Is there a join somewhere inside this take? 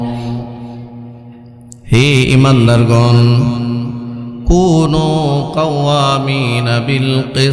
no; 0 cuts

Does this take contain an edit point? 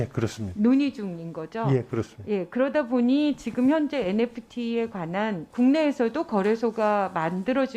yes; 1 cut; at 5.4 s

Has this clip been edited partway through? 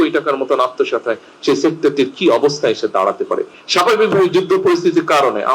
no; 0 cuts

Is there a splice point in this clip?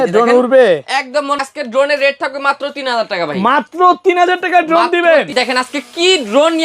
yes; 2 cuts; at 1.4 s, 5.3 s

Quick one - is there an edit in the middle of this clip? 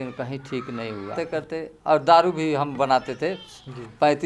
yes; 1 cut; at 1.1 s

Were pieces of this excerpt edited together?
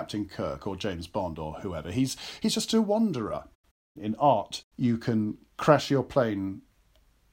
yes; 1 cut; at 3.6 s

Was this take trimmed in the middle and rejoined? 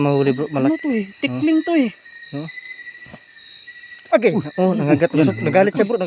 no; 0 cuts

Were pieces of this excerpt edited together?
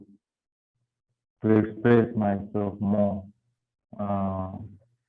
no; 0 cuts

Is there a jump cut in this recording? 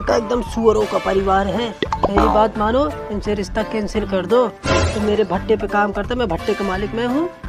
no; 0 cuts

